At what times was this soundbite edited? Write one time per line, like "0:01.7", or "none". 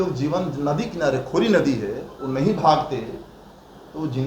none